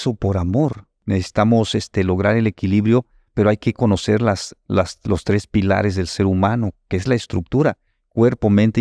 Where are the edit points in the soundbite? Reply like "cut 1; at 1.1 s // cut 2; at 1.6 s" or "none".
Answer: cut 1; at 1.0 s